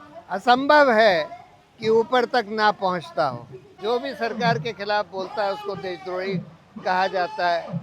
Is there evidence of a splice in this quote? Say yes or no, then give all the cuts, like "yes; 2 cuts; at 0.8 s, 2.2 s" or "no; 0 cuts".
yes; 1 cut; at 3.8 s